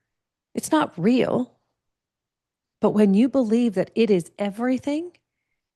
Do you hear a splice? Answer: no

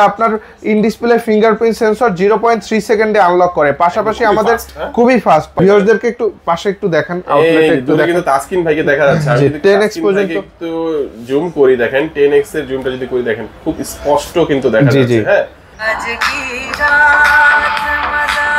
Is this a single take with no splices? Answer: no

